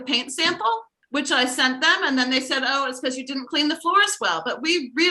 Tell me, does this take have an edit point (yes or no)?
yes